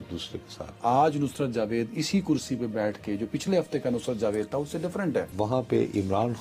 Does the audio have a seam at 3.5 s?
no; 2 cuts; at 0.8 s, 5.3 s

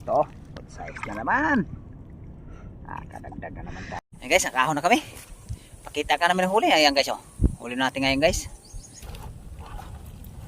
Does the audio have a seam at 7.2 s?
no; 2 cuts; at 4.0 s, 9.0 s

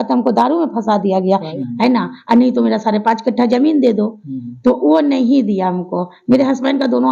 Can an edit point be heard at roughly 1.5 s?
yes; 1 cut; at 1.5 s

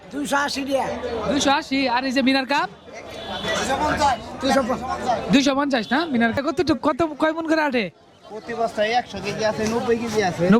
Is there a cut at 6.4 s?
yes; 1 cut; at 6.4 s

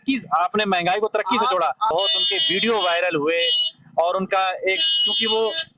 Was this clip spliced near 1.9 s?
yes; 1 cut; at 1.9 s

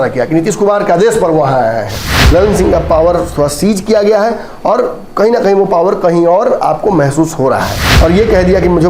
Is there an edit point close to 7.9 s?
yes; 2 cuts; at 2.1 s, 7.9 s

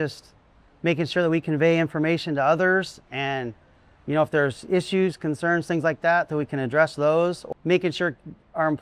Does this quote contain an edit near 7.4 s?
yes; 1 cut; at 7.4 s

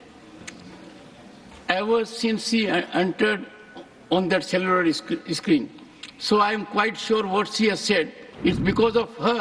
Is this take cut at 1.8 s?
no; 1 cut; at 8.2 s

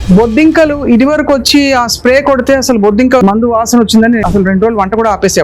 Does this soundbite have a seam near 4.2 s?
yes; 2 cuts; at 3.2 s, 4.2 s

